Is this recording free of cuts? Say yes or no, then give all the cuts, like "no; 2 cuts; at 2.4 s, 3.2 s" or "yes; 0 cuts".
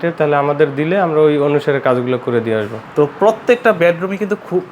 no; 1 cut; at 2.8 s